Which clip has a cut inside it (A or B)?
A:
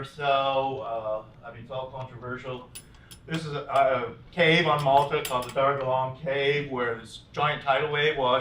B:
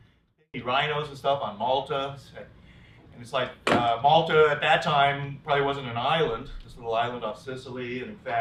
A